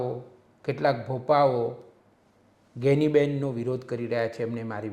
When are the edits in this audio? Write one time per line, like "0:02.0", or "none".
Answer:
none